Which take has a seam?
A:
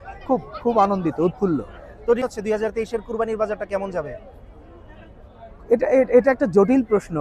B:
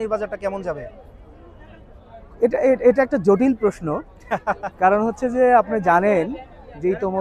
A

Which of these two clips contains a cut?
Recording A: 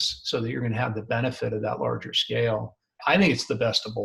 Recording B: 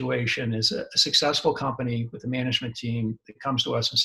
A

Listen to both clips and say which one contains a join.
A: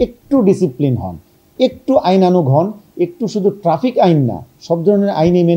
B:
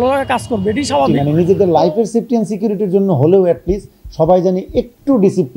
B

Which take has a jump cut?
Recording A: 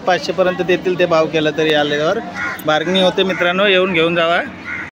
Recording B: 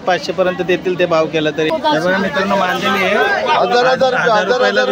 B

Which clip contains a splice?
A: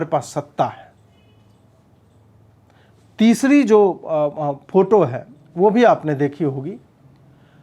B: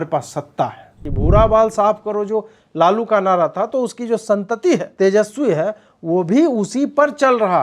B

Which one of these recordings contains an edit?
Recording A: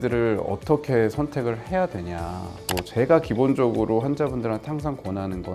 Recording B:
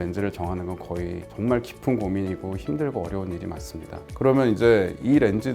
B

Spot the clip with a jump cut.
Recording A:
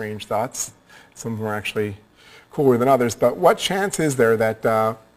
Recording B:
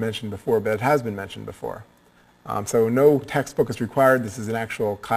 B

